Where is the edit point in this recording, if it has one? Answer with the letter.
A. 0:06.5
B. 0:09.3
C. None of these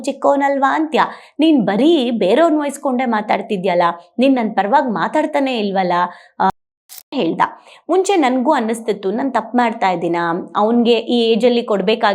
A